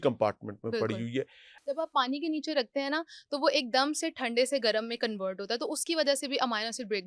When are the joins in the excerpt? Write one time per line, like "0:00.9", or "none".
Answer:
0:01.4